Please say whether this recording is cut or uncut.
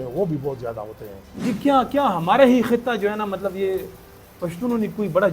cut